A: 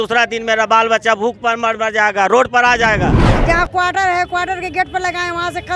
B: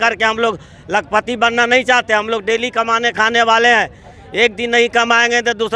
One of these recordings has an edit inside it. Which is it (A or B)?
A